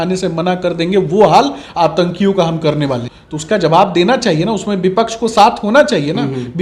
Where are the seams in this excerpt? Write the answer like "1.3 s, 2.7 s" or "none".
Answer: 3.0 s

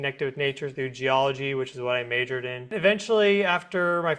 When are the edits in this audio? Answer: 2.7 s

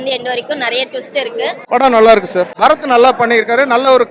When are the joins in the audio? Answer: 1.6 s, 2.5 s

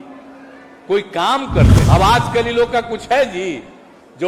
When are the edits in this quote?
1.8 s

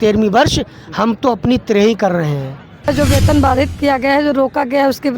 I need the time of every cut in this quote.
2.8 s

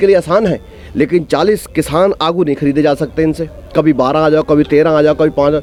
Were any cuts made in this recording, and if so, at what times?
none

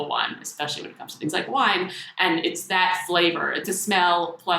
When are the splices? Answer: 3.7 s

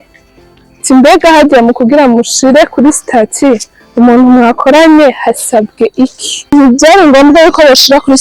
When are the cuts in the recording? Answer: 6.5 s

